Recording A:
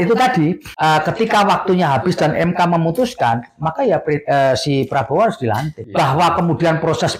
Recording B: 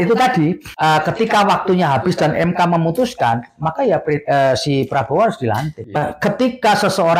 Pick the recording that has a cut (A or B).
B